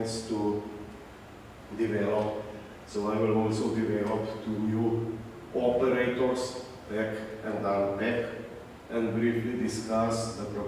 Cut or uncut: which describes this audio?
cut